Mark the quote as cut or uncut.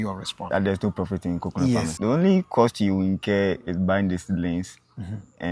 cut